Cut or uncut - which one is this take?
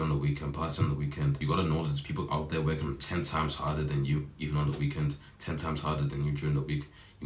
cut